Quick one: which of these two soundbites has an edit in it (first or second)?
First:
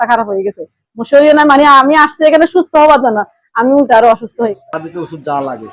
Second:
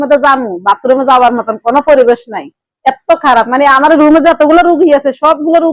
first